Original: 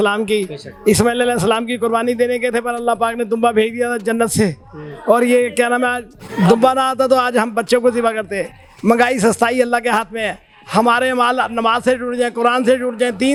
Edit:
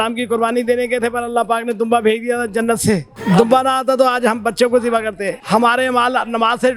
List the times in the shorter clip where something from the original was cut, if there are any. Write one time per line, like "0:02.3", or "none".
0:03.1
0:05.3